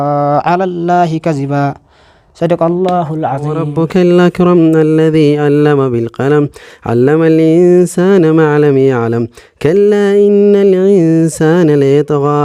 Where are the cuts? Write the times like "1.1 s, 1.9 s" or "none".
3.6 s